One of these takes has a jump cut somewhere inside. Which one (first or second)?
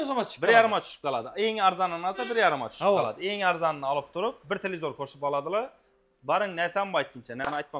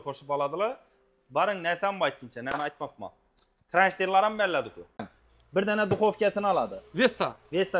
second